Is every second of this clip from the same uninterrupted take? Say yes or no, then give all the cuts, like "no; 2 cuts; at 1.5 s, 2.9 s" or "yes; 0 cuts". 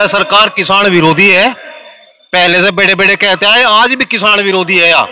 yes; 0 cuts